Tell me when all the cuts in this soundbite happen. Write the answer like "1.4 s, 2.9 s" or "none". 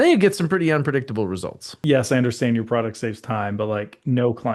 1.7 s